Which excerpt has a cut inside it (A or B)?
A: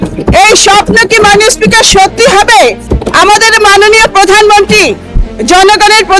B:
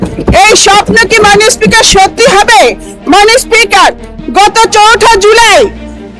A